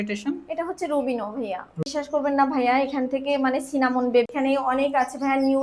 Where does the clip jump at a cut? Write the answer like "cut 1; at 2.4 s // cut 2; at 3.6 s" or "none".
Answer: cut 1; at 1.8 s // cut 2; at 4.3 s

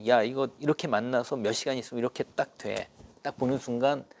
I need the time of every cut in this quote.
none

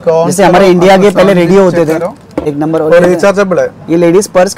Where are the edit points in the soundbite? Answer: cut 1; at 2.4 s

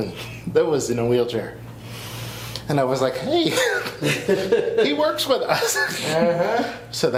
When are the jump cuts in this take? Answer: none

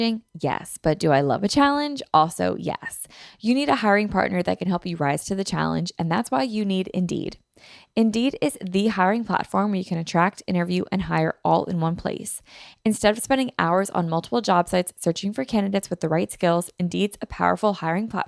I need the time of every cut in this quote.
none

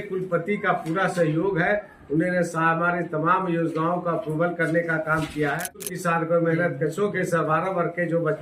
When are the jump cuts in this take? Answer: cut 1; at 5.9 s

